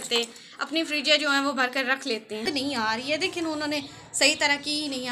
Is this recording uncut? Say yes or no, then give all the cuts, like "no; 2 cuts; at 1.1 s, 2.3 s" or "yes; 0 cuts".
no; 1 cut; at 2.5 s